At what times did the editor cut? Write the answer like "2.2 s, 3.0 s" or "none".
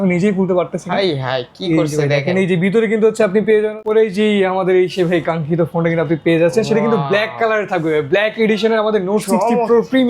3.8 s